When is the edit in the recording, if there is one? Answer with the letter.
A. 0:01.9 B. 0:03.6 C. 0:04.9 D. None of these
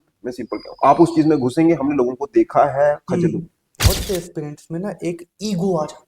B